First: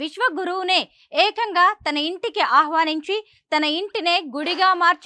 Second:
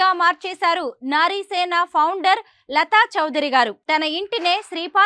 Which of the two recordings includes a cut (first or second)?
second